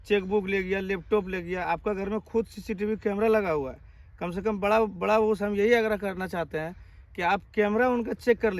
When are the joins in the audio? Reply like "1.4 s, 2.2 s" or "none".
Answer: none